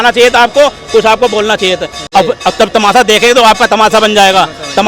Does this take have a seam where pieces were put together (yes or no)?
yes